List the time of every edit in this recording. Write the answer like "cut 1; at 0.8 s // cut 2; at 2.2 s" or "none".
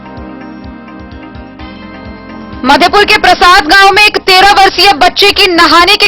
cut 1; at 2.6 s